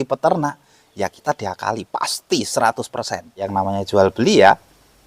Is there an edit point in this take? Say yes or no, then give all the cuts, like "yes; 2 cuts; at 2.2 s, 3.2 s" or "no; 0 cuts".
yes; 1 cut; at 3.5 s